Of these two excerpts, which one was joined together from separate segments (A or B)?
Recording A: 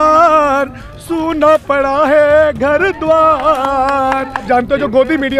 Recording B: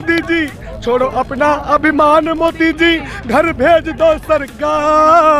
A